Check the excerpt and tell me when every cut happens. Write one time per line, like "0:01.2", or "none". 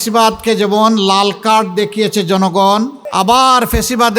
0:03.0

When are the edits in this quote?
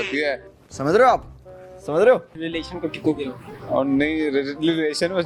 0:02.5

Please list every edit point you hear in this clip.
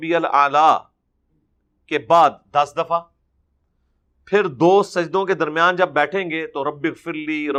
none

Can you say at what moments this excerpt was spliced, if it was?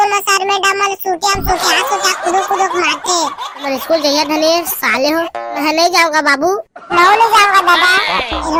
none

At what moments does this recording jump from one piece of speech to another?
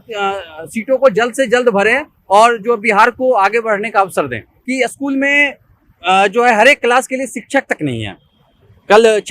0:04.5

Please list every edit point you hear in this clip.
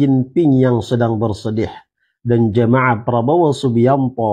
none

